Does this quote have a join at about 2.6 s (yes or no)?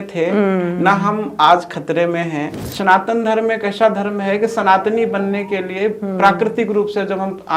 yes